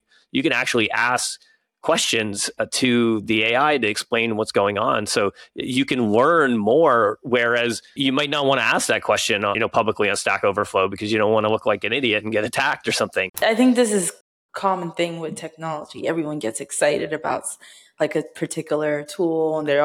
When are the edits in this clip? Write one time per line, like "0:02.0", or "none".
0:07.9
0:09.6
0:13.4